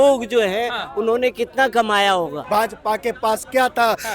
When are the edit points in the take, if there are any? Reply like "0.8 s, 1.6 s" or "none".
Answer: 2.4 s